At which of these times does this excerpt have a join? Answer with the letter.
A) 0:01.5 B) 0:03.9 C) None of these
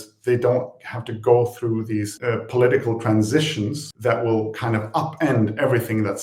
B